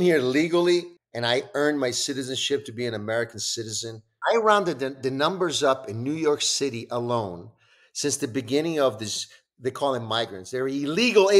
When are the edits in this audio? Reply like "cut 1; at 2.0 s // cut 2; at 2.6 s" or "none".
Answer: cut 1; at 0.9 s // cut 2; at 4.1 s